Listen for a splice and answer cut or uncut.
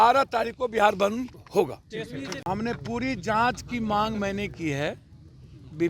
cut